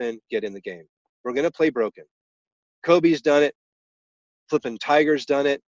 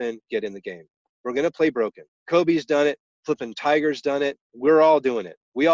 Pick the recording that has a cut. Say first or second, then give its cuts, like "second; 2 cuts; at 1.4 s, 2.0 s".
second; 3 cuts; at 2.1 s, 3.1 s, 4.5 s